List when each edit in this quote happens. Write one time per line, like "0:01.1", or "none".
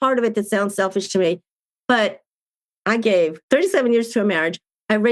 0:03.4

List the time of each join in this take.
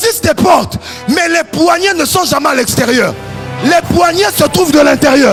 none

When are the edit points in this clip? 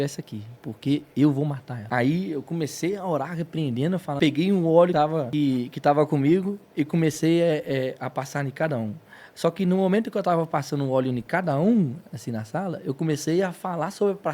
0:01.7
0:04.1
0:05.0

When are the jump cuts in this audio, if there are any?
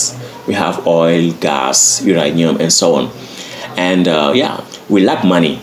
0:04.7

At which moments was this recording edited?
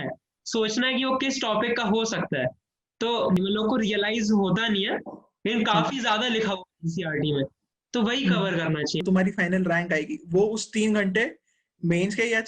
0:03.4
0:09.0

